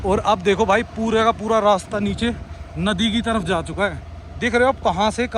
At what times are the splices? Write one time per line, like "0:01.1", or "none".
none